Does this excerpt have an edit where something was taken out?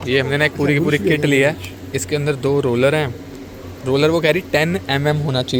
no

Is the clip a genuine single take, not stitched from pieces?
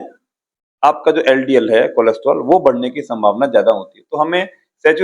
yes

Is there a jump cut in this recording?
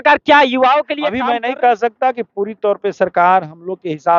yes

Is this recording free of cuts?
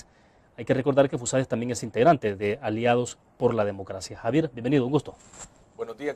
yes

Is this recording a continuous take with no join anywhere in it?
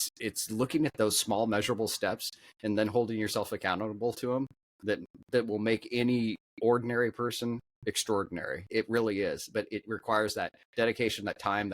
no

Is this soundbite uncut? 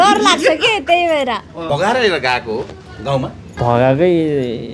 no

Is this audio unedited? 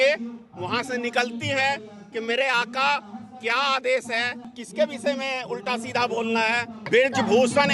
no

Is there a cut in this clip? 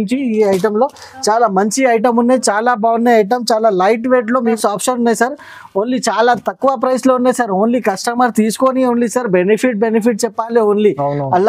yes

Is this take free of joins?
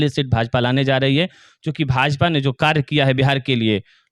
yes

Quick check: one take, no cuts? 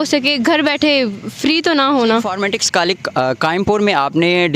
no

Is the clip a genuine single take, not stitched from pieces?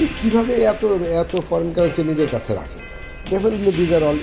yes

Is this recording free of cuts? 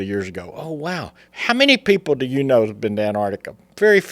no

